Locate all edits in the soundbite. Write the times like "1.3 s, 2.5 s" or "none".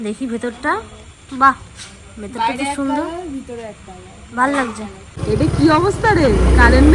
5.2 s